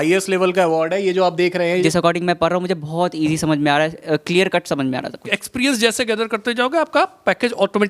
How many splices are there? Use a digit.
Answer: 2